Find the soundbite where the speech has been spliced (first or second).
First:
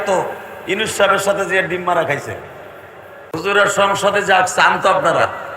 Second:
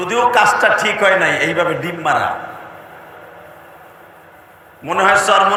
first